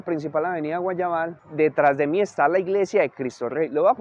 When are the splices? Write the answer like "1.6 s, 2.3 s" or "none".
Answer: none